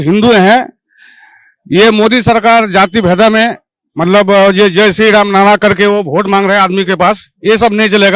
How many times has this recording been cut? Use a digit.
0